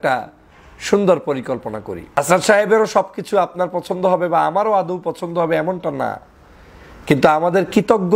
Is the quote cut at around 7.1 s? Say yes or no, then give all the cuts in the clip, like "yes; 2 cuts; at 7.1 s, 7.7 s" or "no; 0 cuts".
no; 1 cut; at 2.2 s